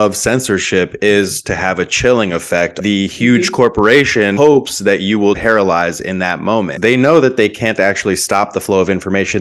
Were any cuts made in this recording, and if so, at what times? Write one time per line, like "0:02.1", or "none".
0:02.8
0:05.4
0:06.7